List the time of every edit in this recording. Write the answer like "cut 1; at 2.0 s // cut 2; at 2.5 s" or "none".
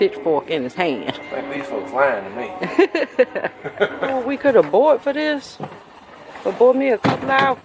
cut 1; at 4.2 s